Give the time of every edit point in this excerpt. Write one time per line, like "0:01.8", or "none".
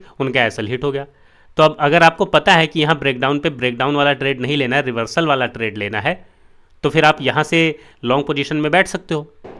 none